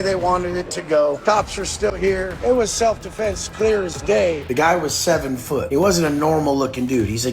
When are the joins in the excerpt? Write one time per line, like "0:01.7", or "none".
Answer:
0:01.2
0:02.4
0:04.4
0:05.7

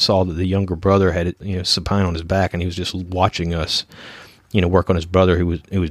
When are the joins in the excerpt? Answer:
0:01.3

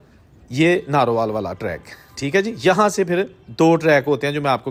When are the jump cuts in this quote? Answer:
none

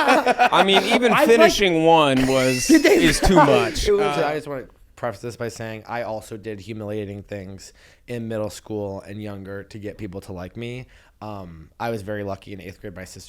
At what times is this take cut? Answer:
0:04.0

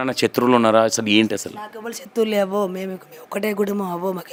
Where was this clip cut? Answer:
none

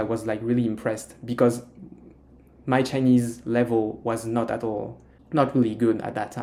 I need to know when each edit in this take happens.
none

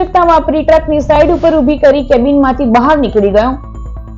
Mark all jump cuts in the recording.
none

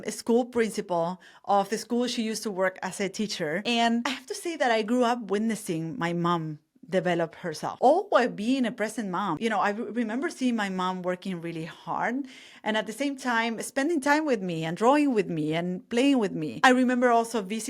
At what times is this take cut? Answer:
0:04.0
0:07.7
0:09.3

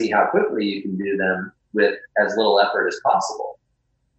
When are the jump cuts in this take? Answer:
none

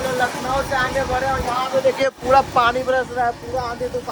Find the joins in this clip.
none

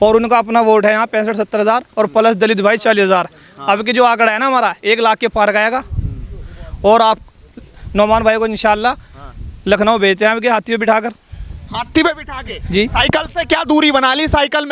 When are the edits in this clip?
none

